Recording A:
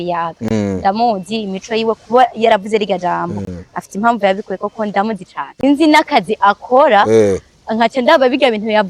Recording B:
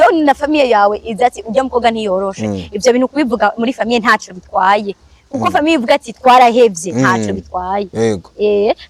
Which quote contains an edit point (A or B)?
A